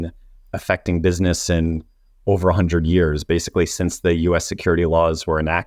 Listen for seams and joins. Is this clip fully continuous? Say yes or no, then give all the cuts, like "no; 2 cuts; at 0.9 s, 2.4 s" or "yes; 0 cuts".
yes; 0 cuts